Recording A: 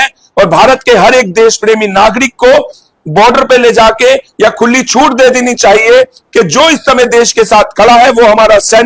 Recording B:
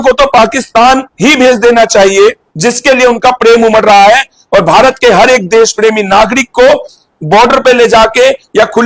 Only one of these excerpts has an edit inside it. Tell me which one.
B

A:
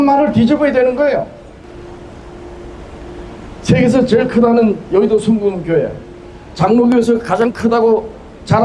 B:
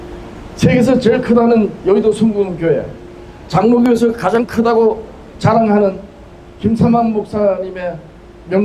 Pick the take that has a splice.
A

